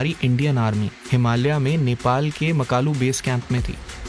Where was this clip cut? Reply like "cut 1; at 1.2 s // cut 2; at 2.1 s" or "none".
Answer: cut 1; at 1.0 s